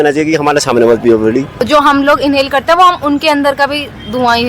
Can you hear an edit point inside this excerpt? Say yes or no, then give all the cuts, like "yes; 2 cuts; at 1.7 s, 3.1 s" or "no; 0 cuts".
yes; 1 cut; at 1.7 s